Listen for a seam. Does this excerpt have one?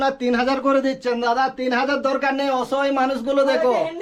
no; 0 cuts

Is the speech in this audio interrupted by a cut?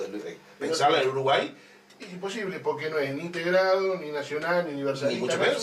yes; 1 cut; at 3.0 s

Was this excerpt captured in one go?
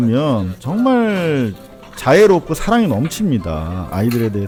yes; 0 cuts

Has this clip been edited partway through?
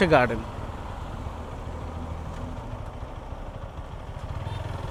no; 0 cuts

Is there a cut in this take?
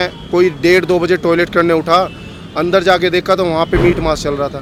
no; 0 cuts

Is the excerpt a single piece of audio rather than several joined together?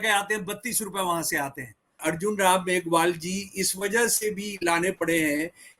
no; 1 cut; at 2.0 s

